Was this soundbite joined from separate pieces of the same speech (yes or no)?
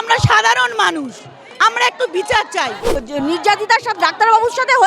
yes